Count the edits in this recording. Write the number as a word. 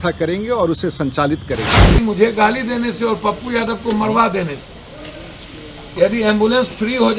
one